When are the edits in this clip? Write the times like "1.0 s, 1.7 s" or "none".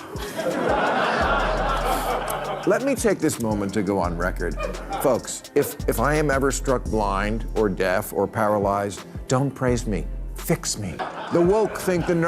11.0 s